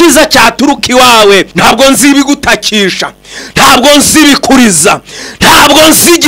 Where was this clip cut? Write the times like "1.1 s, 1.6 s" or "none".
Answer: 1.5 s